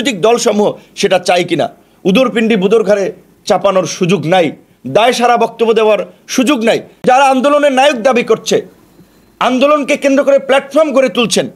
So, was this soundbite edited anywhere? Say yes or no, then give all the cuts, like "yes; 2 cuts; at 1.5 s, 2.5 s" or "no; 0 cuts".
yes; 1 cut; at 7.0 s